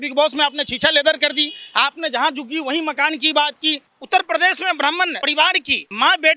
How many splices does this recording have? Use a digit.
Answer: 2